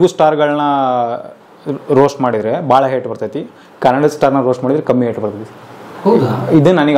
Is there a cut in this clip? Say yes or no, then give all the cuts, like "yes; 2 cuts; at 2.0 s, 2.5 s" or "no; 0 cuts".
no; 0 cuts